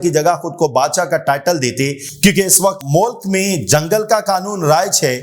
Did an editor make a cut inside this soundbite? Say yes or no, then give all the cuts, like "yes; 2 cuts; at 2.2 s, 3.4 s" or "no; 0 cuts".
no; 0 cuts